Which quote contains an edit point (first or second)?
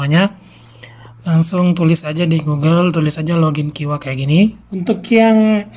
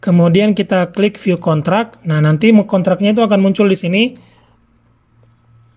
first